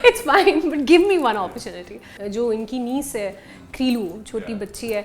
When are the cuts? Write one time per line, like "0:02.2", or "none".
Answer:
0:02.2